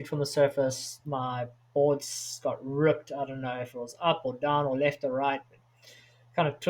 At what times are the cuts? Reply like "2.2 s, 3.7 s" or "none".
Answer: none